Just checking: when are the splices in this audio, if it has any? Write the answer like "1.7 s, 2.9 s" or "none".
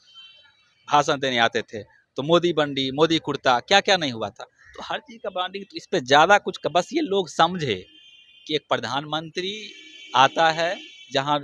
none

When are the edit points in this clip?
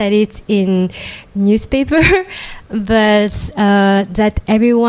none

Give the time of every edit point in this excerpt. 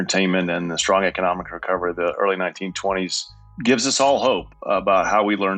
3.5 s, 4.5 s

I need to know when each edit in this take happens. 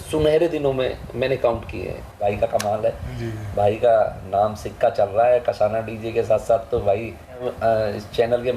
2.2 s, 7.5 s

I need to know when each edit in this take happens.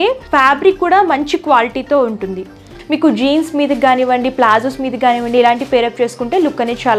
2.7 s

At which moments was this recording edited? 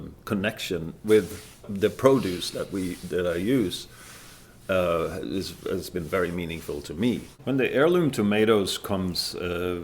1.7 s, 7.3 s

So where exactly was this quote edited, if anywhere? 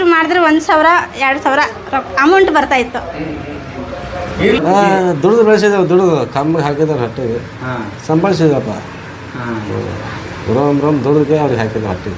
4.6 s

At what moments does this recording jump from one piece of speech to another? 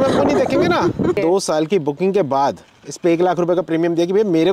1.2 s

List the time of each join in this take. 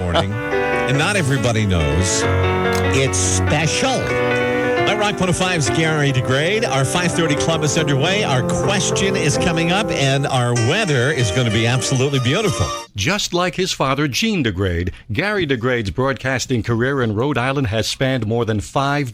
none

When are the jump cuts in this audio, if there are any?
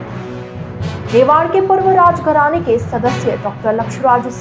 1.1 s

